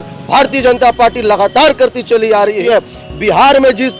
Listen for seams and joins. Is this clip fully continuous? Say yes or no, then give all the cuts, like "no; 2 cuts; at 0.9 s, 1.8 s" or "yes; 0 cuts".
no; 1 cut; at 2.6 s